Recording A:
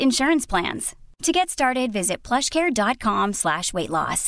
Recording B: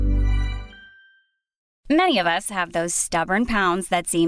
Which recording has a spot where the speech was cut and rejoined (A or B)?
B